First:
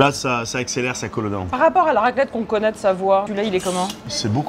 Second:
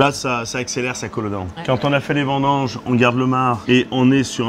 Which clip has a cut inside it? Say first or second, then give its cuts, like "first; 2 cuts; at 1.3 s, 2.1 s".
first; 2 cuts; at 1.5 s, 3.5 s